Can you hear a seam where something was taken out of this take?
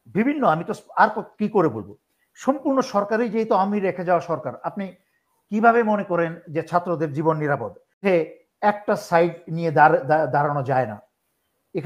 yes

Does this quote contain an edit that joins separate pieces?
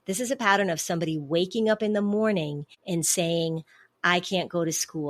yes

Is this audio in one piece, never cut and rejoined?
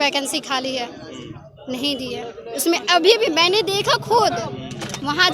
yes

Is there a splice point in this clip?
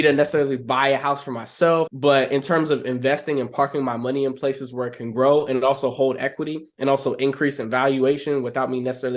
yes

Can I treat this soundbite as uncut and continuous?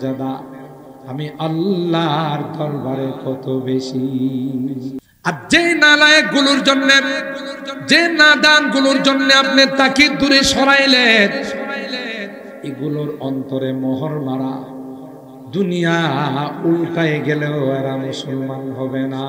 no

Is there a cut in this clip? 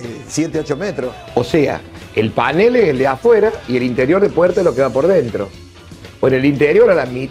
yes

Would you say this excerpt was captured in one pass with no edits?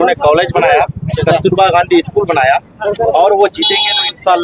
yes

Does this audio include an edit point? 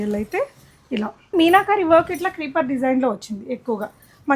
yes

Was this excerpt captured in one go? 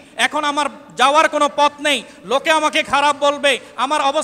yes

